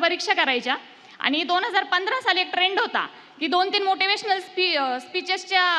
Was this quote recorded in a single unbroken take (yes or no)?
yes